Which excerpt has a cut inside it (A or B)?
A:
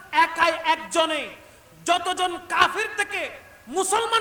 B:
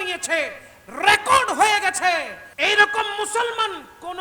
B